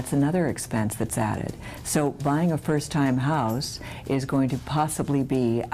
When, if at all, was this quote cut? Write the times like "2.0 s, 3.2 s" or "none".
none